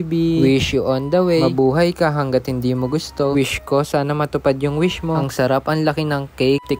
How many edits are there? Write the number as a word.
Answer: zero